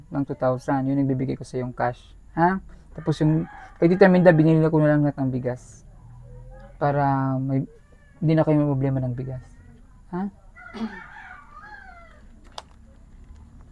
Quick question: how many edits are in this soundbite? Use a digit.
0